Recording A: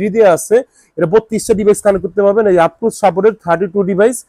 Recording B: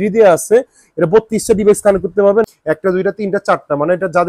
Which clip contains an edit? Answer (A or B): B